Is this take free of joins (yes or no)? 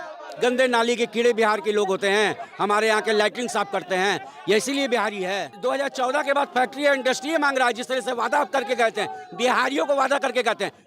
no